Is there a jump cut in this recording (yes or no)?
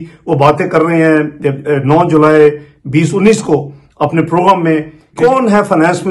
yes